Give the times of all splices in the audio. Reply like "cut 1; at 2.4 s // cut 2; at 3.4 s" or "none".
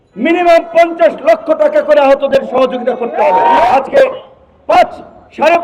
cut 1; at 3.7 s